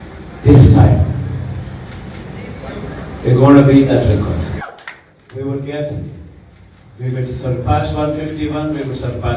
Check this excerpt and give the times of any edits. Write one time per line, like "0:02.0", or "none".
0:04.6

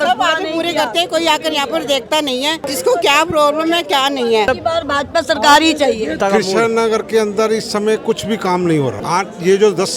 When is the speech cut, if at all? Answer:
0:02.7
0:04.5
0:06.2
0:09.0

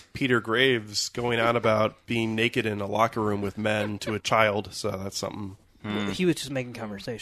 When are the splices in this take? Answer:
none

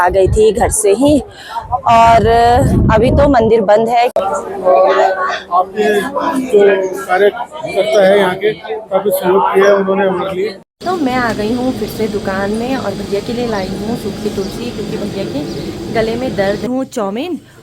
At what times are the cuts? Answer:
0:04.1
0:10.6
0:16.7

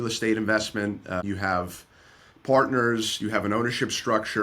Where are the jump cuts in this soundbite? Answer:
0:01.2

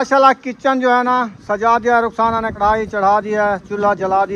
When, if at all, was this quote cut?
0:02.5

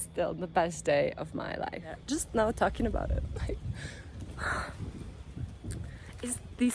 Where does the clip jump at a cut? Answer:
0:02.0

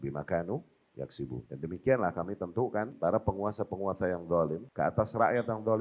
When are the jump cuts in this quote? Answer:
0:01.5
0:02.9
0:04.6

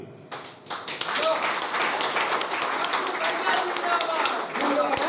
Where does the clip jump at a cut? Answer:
none

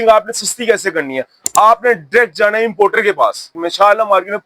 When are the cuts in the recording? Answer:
0:03.5

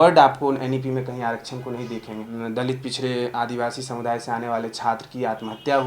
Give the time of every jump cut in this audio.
0:02.3

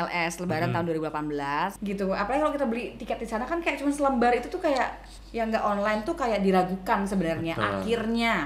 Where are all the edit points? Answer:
0:01.8

